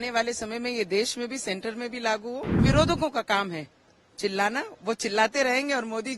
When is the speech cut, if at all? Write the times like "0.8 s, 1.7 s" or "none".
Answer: 2.7 s